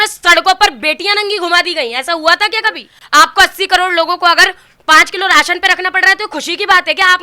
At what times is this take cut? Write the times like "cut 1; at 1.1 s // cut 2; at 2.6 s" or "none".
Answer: cut 1; at 2.9 s